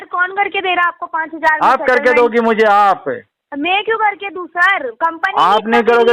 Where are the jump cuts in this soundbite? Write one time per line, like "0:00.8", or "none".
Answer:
none